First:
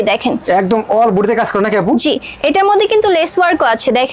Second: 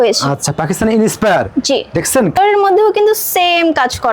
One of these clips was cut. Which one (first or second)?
second